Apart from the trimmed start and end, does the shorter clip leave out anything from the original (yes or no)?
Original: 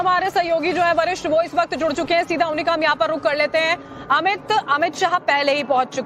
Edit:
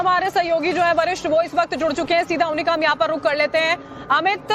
no